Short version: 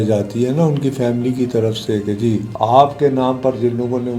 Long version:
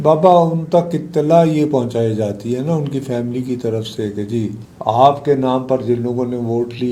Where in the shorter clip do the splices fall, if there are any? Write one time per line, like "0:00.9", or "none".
0:02.5